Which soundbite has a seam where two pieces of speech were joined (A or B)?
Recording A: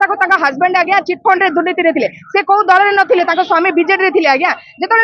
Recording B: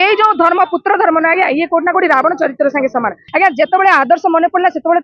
B